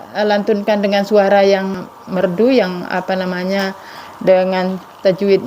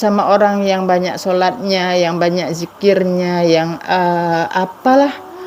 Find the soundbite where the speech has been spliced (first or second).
first